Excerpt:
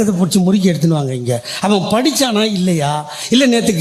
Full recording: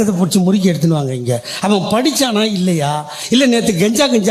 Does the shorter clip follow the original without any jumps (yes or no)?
yes